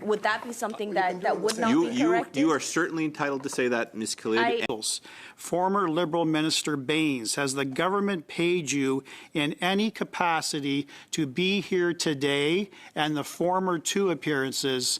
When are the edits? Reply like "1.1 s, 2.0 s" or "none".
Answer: 4.6 s

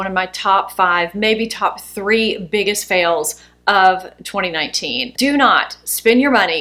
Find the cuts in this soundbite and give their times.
none

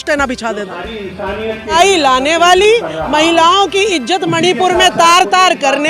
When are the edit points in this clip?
1.7 s

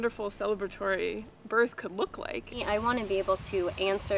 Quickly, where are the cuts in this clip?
2.6 s

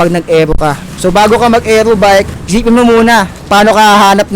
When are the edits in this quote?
0.9 s, 2.4 s, 3.4 s

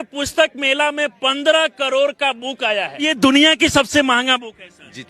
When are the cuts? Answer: 3.0 s

